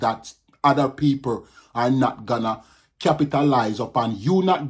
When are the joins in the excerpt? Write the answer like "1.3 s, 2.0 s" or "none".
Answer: none